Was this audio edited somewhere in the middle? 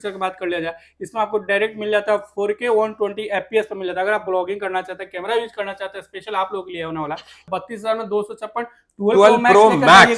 yes; 1 cut; at 7.4 s

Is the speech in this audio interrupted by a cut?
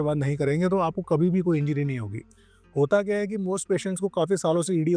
no; 0 cuts

